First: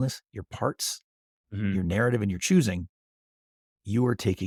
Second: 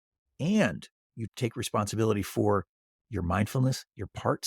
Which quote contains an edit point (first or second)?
second